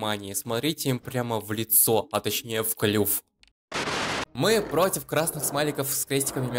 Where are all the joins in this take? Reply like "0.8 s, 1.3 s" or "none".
4.3 s